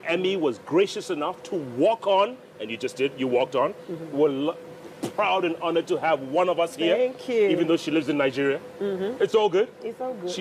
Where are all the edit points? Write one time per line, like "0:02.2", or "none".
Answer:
0:03.8